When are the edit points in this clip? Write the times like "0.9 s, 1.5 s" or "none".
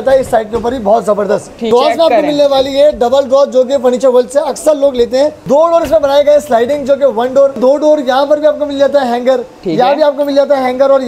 1.7 s, 5.4 s, 7.6 s